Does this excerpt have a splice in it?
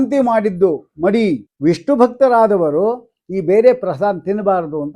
yes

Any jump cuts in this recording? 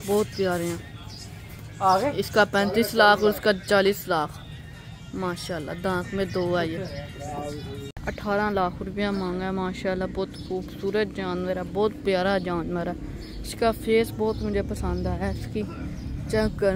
no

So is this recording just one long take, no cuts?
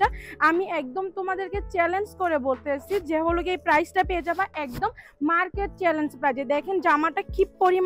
yes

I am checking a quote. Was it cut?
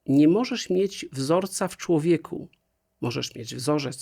no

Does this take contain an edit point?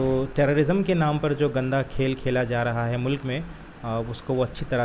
no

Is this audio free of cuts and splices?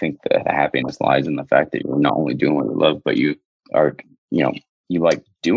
yes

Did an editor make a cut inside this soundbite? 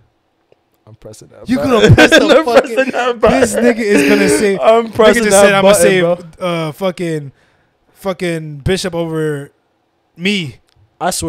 no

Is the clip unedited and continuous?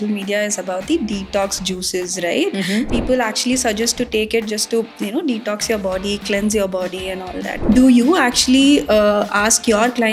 no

